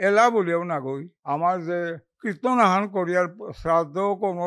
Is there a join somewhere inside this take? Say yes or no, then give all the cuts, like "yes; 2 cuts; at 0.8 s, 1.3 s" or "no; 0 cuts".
yes; 2 cuts; at 1.1 s, 2.1 s